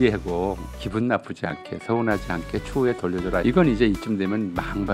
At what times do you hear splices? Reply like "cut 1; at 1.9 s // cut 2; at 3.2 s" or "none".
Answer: cut 1; at 3.4 s